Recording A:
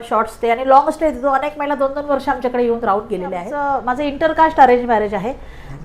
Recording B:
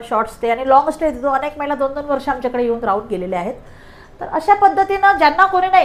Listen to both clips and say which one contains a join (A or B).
A